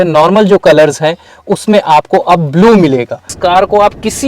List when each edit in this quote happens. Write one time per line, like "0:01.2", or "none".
0:03.3